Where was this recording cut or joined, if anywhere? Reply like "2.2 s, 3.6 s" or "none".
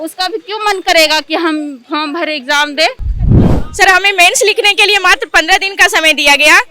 3.1 s